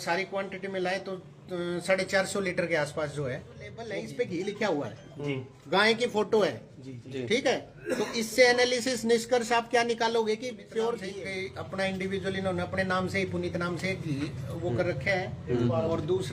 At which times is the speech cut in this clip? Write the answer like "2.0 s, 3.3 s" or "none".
3.8 s, 11.1 s